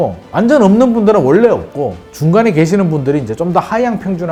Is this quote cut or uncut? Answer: uncut